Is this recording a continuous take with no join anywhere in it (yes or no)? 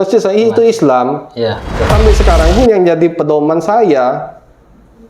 no